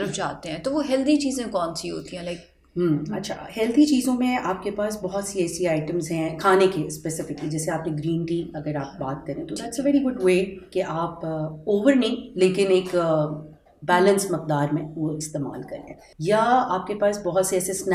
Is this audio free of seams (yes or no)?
yes